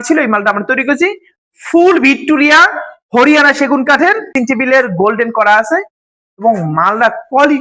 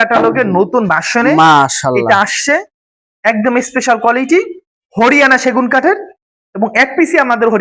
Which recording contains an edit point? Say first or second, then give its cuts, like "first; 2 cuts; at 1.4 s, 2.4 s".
first; 1 cut; at 4.3 s